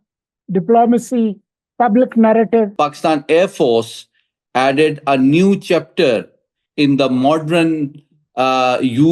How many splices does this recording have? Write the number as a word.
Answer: one